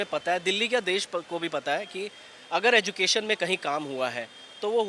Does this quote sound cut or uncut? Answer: uncut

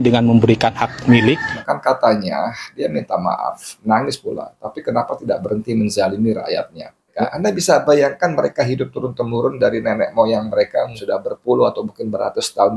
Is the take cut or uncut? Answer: cut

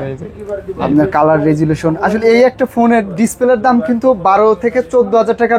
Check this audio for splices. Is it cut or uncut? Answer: uncut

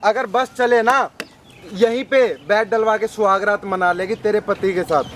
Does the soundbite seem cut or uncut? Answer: uncut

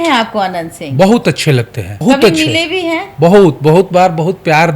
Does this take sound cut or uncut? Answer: cut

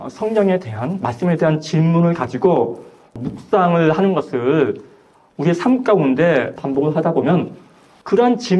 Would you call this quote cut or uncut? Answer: cut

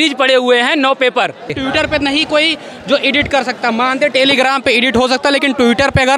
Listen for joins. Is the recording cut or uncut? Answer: cut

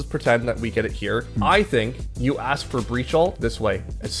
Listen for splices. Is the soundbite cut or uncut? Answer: cut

